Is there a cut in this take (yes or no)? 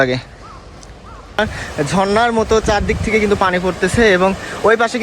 yes